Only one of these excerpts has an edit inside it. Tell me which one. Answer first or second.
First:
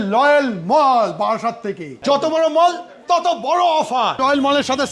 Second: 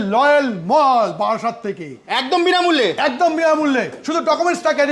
first